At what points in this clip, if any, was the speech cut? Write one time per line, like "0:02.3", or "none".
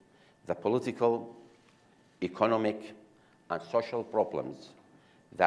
none